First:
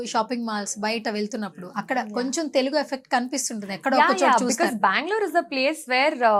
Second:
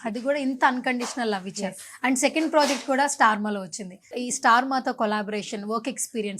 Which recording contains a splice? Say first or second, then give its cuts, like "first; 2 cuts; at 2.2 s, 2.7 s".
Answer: second; 1 cut; at 4.1 s